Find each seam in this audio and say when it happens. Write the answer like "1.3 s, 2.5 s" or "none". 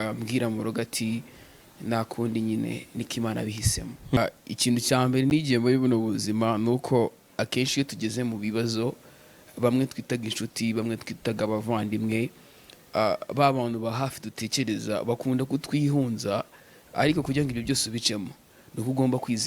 4.2 s